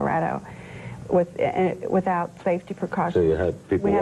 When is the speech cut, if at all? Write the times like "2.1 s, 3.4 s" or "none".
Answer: none